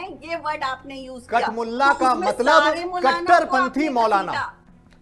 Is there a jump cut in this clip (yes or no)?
no